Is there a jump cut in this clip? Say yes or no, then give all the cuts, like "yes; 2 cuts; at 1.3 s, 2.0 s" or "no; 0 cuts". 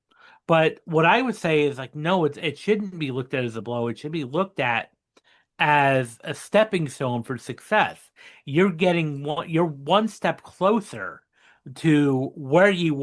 no; 0 cuts